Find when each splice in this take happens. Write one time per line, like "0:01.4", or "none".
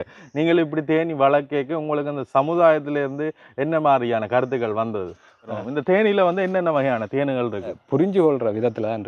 0:05.6
0:07.8